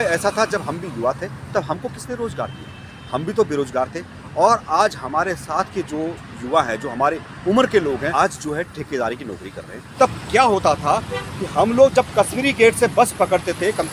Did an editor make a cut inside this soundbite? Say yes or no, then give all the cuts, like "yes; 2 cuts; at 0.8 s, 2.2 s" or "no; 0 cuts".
yes; 1 cut; at 9.8 s